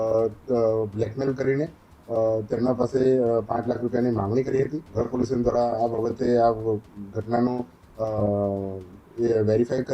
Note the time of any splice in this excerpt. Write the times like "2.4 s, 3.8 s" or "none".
4.8 s